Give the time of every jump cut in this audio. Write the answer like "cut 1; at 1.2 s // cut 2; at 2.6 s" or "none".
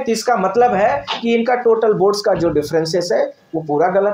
none

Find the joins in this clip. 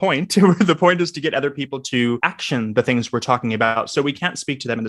cut 1; at 2.3 s // cut 2; at 3.7 s

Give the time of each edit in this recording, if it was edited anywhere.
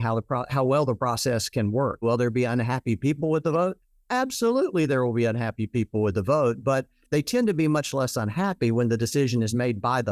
cut 1; at 2.0 s

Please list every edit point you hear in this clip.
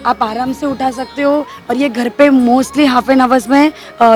none

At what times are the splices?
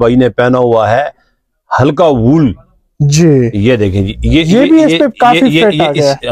none

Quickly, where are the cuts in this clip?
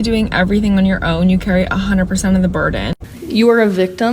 cut 1; at 3.0 s

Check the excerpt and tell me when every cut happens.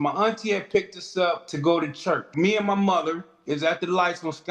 cut 1; at 1.5 s // cut 2; at 2.3 s

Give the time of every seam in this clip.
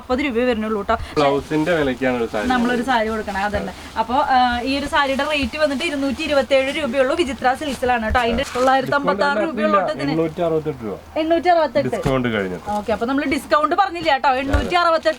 cut 1; at 1.1 s // cut 2; at 8.4 s

